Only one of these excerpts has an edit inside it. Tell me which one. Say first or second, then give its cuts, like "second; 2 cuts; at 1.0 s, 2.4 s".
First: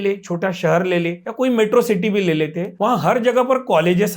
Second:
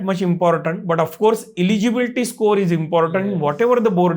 first; 2 cuts; at 1.2 s, 2.6 s